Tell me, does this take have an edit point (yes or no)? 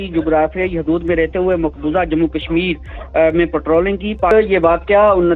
yes